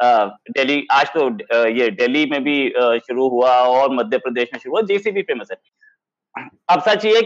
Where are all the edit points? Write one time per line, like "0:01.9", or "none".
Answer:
none